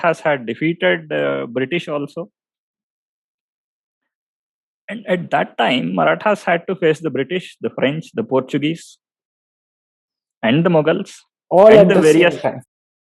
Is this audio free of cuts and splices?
yes; 0 cuts

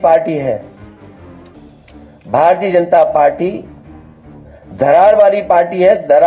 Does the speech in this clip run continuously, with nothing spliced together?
yes; 0 cuts

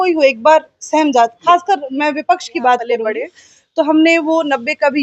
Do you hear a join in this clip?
yes; 1 cut; at 3.0 s

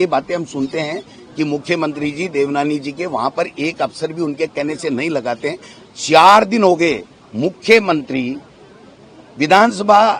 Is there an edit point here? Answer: no; 0 cuts

